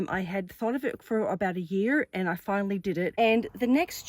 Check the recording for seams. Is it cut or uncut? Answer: cut